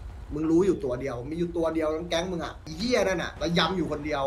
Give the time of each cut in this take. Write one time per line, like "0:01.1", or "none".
0:02.7
0:03.3